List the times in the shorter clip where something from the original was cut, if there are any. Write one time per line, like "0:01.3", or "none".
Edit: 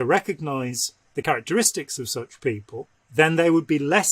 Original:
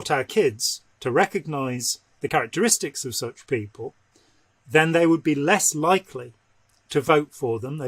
0:03.0